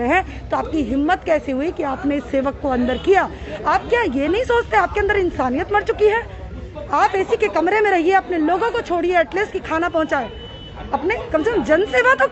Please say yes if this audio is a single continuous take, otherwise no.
yes